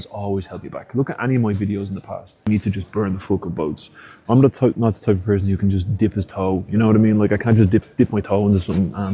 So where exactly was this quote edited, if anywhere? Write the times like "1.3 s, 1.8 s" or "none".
2.3 s